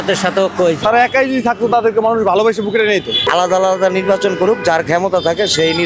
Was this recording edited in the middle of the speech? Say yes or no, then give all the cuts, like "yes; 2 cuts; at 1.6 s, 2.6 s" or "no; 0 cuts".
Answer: yes; 2 cuts; at 0.8 s, 3.2 s